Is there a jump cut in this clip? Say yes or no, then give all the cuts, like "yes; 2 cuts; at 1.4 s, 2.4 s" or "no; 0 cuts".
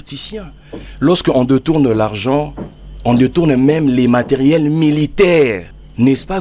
no; 0 cuts